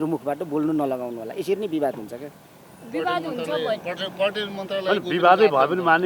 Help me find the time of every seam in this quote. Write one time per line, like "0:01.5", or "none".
none